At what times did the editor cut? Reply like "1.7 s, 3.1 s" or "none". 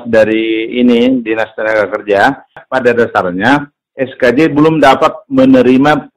2.6 s